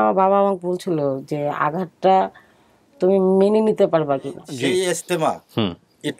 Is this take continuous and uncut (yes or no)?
no